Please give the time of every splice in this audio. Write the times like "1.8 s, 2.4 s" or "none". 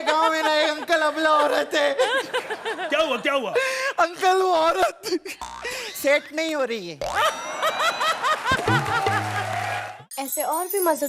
9.8 s